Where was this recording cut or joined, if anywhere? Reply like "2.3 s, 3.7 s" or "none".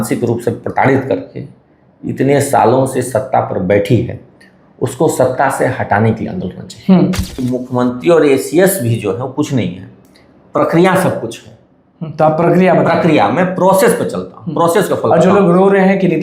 7.3 s